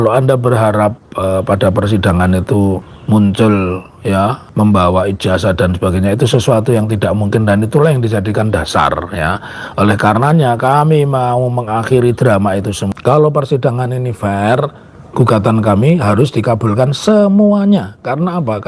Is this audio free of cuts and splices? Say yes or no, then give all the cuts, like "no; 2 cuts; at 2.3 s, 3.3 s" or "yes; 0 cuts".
no; 4 cuts; at 1.1 s, 2.9 s, 4.4 s, 12.9 s